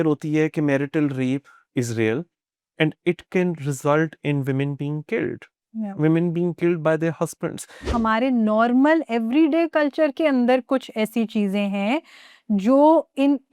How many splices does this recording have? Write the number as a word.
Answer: one